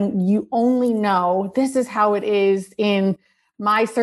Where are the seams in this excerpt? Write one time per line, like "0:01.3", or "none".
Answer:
none